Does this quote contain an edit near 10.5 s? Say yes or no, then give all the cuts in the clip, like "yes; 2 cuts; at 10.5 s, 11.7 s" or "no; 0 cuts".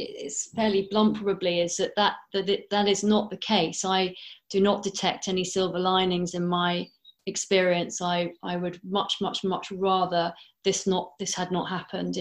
no; 0 cuts